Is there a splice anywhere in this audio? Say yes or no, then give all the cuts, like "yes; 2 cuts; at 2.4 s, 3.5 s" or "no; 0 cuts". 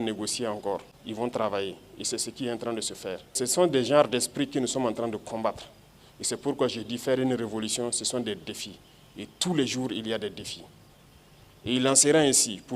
yes; 2 cuts; at 0.9 s, 3.3 s